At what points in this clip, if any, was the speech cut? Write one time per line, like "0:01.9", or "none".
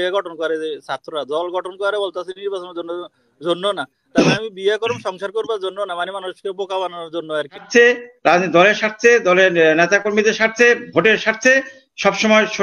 0:07.7